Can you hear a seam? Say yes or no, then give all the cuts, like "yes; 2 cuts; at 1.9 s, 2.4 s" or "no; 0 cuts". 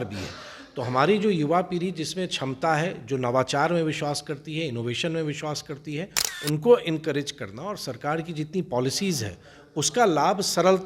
no; 0 cuts